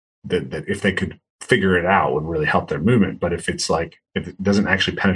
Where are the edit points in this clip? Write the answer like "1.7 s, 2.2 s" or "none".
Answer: 4.0 s